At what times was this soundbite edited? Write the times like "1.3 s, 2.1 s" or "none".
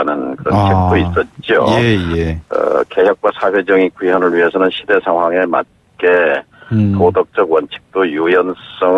4.2 s